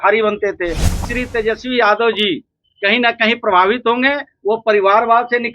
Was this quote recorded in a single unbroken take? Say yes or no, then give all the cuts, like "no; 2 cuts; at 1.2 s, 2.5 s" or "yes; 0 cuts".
no; 1 cut; at 1.0 s